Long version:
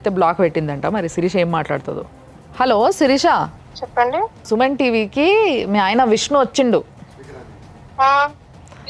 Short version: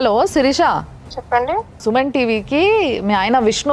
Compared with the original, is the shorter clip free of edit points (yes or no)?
yes